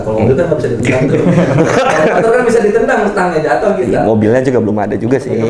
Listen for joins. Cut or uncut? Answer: uncut